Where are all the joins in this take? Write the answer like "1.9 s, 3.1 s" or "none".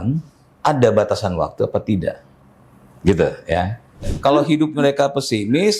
4.1 s